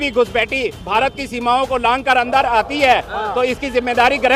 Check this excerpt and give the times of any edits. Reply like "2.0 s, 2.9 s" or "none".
none